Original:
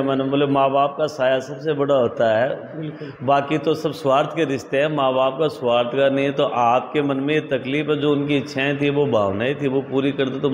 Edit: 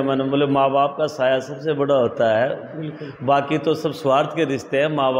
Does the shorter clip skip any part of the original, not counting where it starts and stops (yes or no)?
no